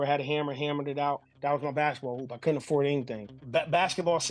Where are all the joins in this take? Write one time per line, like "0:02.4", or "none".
0:03.3